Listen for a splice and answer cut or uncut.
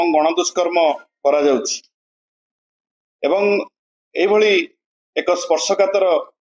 uncut